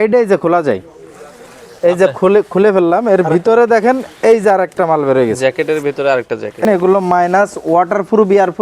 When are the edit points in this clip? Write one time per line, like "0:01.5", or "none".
0:06.6